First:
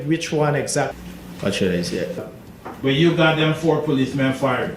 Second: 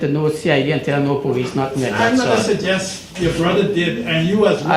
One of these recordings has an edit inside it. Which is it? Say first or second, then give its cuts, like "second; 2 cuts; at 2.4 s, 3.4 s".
first; 2 cuts; at 0.9 s, 2.2 s